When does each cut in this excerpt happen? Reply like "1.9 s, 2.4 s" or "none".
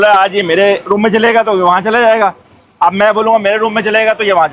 none